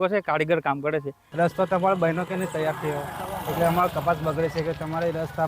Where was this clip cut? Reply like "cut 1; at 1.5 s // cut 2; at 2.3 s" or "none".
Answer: cut 1; at 1.2 s